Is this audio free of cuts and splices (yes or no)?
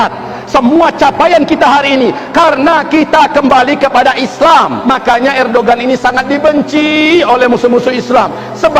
no